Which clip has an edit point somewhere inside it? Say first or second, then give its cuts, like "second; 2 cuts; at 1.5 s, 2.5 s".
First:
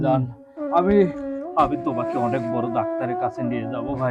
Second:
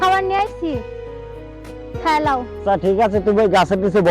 second; 1 cut; at 2.5 s